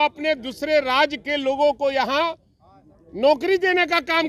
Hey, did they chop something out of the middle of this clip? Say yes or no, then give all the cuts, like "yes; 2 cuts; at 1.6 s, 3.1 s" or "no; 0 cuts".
no; 0 cuts